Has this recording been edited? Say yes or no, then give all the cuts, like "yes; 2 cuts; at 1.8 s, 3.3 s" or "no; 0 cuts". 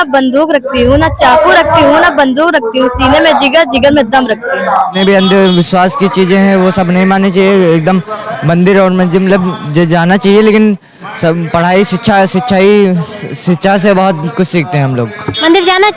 yes; 1 cut; at 4.9 s